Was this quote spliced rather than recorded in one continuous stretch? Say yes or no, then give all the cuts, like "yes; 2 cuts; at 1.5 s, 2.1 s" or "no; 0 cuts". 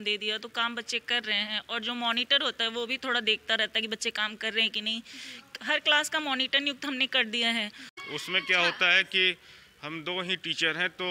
yes; 1 cut; at 7.9 s